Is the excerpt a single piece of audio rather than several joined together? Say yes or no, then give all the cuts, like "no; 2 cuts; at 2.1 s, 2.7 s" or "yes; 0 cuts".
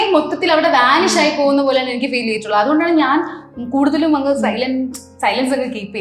yes; 0 cuts